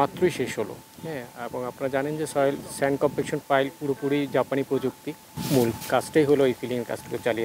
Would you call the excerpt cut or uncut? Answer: cut